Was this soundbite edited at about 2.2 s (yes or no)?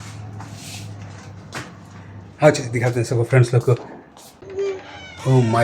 no